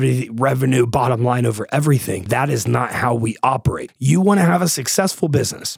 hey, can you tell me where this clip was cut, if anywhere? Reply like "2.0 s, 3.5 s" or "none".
2.3 s, 3.9 s